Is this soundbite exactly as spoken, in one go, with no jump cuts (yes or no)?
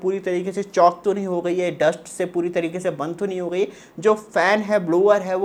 yes